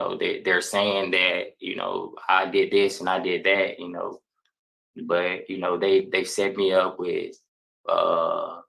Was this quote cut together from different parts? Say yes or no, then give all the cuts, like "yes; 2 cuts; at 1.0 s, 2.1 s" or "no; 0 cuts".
no; 0 cuts